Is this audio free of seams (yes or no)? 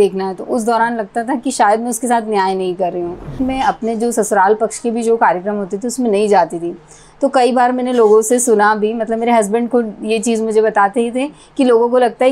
no